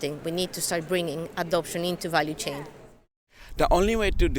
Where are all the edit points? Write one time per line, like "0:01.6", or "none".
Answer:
0:03.3